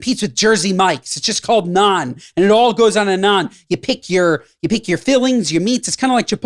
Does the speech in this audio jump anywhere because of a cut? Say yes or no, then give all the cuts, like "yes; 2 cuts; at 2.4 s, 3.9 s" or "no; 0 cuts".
no; 0 cuts